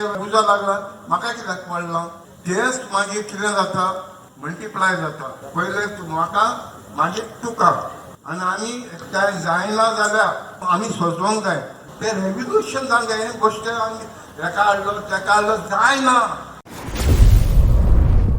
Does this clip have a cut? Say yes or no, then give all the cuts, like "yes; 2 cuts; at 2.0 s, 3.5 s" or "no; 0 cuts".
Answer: yes; 1 cut; at 16.7 s